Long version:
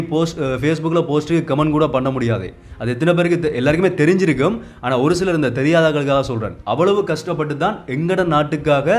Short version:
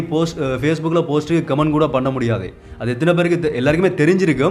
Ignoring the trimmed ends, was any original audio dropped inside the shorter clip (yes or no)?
no